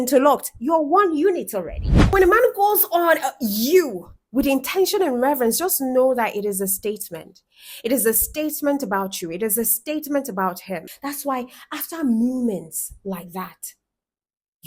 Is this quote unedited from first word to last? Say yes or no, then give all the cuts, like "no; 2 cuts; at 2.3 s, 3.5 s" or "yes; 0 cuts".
no; 2 cuts; at 2.0 s, 10.9 s